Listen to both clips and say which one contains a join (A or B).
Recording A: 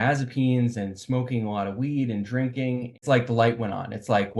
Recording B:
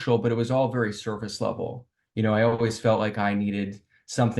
A